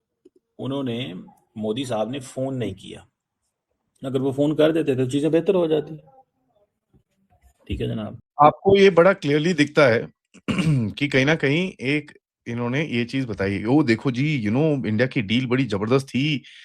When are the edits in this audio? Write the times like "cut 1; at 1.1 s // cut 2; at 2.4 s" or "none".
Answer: cut 1; at 8.1 s